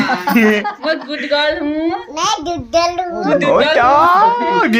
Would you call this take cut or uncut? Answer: uncut